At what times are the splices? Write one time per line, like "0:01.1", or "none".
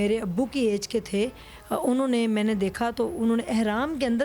none